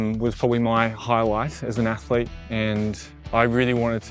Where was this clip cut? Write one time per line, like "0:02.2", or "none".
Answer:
0:03.1